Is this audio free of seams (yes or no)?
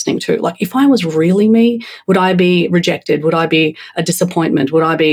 yes